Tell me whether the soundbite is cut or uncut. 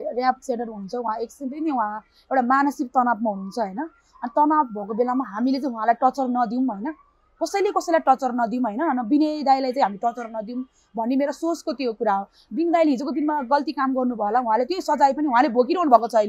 uncut